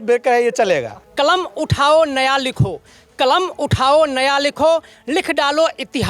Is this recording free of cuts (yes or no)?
no